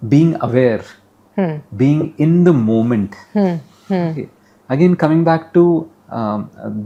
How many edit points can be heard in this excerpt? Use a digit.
0